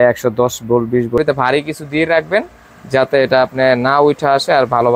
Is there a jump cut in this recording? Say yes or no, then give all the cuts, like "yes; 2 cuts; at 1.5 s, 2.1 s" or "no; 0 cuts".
yes; 1 cut; at 1.2 s